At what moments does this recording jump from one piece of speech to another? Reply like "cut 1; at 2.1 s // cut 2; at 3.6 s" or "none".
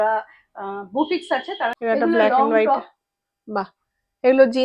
cut 1; at 1.8 s